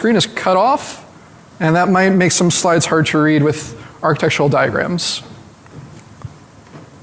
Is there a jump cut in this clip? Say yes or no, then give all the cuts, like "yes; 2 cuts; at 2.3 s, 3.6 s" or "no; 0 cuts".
yes; 1 cut; at 4.5 s